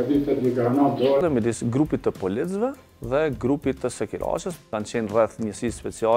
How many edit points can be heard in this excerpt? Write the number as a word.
one